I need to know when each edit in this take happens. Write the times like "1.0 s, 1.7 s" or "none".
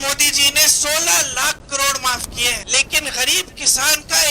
2.6 s